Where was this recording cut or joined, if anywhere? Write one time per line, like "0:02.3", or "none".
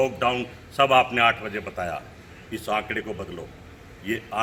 none